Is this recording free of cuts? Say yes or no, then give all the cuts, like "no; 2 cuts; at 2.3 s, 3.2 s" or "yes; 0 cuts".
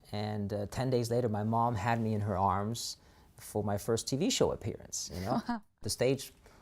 no; 1 cut; at 5.7 s